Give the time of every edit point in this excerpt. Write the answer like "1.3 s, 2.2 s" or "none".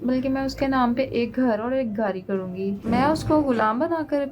2.8 s